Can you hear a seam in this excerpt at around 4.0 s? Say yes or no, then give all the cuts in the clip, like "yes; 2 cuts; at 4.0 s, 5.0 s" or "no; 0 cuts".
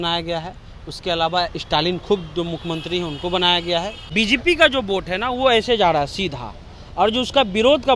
yes; 1 cut; at 4.0 s